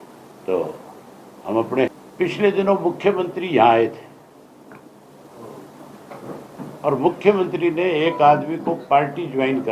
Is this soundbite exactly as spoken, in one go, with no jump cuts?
no; 1 cut; at 2.0 s

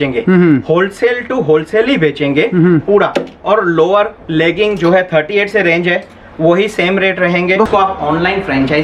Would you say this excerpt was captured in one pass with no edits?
no; 1 cut; at 7.7 s

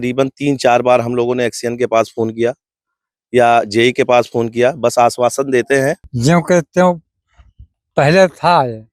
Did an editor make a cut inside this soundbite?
yes; 1 cut; at 6.1 s

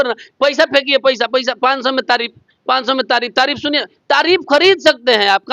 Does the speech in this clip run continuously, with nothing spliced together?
yes; 0 cuts

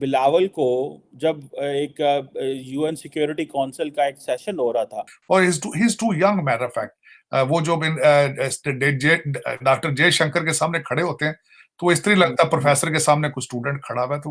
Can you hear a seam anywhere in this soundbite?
yes; 1 cut; at 5.1 s

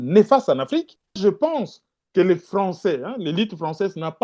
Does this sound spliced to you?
yes; 1 cut; at 1.2 s

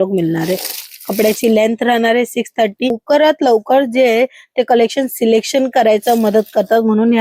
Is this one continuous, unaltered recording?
no; 1 cut; at 3.0 s

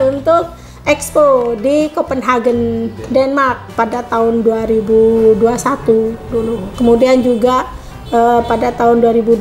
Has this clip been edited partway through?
yes; 1 cut; at 3.6 s

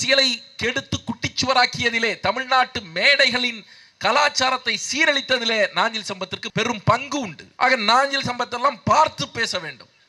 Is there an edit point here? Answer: yes; 1 cut; at 7.4 s

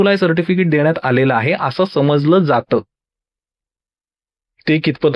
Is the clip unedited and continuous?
yes; 0 cuts

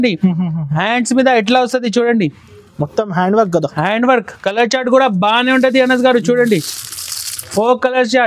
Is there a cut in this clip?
no; 0 cuts

